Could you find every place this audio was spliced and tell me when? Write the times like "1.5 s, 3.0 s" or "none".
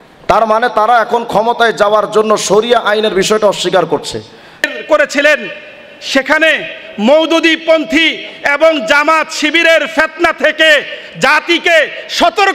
4.7 s